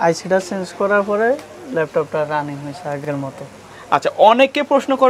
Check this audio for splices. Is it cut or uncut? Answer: uncut